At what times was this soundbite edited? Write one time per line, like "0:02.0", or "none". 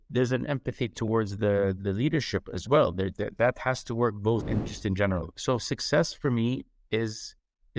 0:04.5